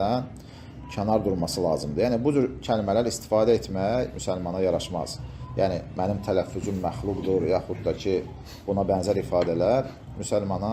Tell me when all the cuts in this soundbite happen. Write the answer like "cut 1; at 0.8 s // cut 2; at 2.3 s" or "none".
none